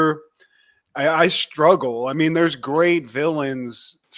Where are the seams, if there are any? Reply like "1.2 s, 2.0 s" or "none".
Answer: none

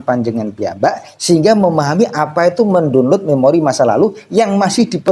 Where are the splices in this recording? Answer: none

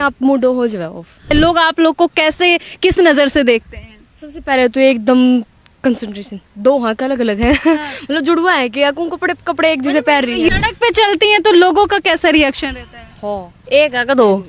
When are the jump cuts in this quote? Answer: 1.3 s, 10.5 s

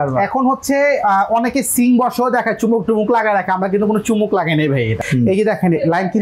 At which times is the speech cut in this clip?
5.0 s

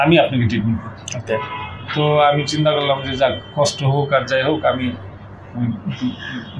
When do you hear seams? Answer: none

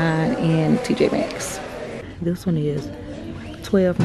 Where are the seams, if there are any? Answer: 2.0 s

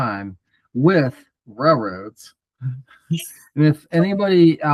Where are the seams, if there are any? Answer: none

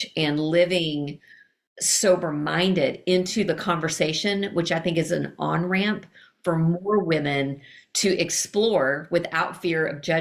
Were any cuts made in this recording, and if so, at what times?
none

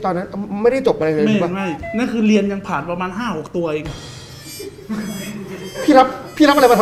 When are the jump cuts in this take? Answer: none

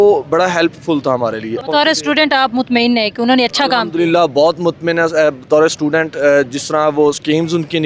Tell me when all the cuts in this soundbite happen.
1.6 s

